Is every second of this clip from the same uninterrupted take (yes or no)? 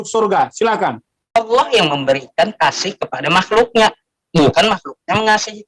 no